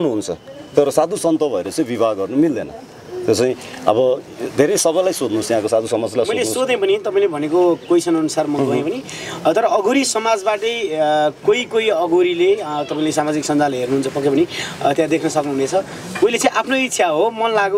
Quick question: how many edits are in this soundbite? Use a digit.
0